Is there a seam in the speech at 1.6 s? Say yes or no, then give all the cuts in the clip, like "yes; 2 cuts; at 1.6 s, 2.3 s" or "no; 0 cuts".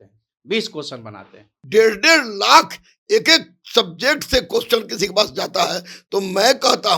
yes; 1 cut; at 1.6 s